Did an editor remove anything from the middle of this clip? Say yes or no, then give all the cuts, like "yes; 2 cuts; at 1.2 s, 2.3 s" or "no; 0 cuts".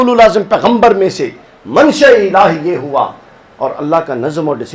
no; 0 cuts